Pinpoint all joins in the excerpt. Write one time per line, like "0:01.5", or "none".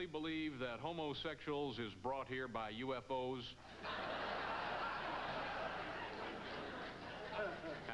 0:05.1